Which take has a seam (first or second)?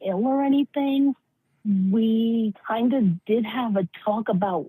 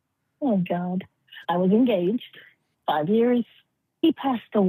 first